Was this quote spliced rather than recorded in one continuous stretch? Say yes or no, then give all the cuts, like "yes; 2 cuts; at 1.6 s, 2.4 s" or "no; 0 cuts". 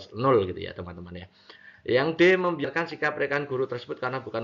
yes; 1 cut; at 3.1 s